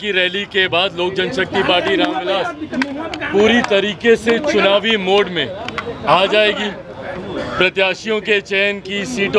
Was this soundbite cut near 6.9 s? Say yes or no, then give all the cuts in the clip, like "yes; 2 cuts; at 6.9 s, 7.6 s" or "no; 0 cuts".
no; 0 cuts